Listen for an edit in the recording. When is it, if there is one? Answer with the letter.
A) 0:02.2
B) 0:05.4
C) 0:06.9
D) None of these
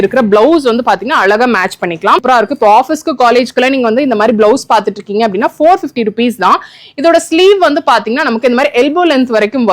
A